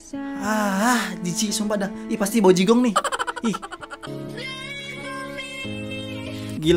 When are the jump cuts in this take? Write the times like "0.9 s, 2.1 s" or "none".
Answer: 4.0 s